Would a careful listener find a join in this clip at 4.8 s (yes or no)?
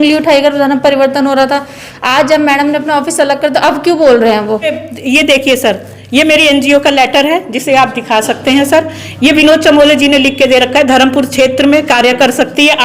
yes